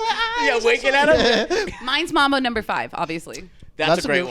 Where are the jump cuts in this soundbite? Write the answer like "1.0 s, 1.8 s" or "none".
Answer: 1.7 s